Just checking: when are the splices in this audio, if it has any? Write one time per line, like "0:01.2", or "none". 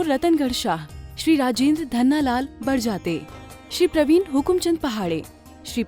none

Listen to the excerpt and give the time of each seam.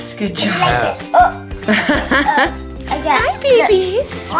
0:01.6

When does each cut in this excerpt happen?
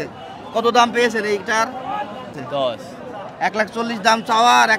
0:02.4

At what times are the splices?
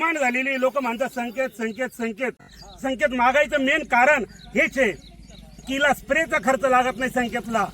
0:02.6

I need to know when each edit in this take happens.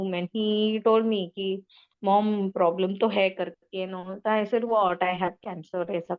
none

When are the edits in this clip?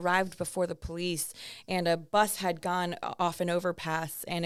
none

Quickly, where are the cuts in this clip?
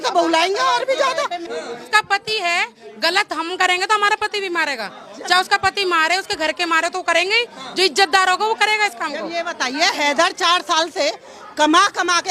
0:01.5

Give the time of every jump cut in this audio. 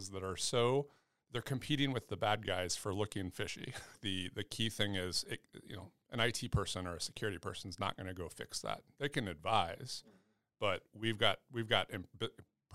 0:03.9

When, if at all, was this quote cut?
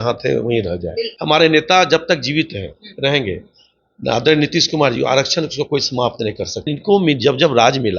0:01.1
0:06.7

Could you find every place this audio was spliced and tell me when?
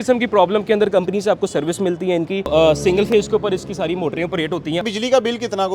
0:02.5
0:04.8

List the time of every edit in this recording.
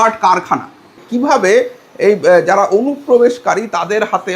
0:01.0

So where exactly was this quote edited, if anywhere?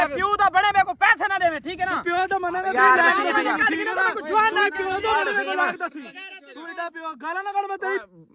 none

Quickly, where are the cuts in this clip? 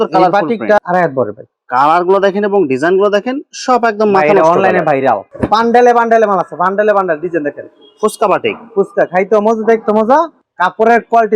0:00.8
0:05.3
0:10.4

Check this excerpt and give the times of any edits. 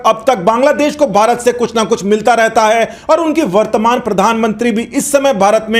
none

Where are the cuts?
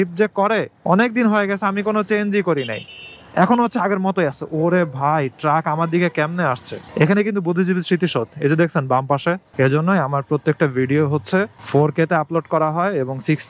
0:06.7
0:09.5

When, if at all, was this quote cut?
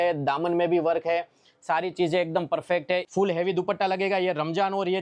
0:03.1

